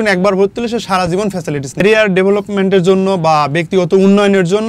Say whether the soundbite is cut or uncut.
uncut